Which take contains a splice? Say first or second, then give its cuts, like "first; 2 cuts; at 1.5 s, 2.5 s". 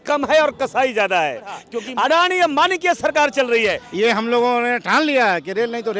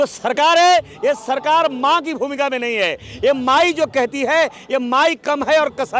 first; 2 cuts; at 1.7 s, 3.8 s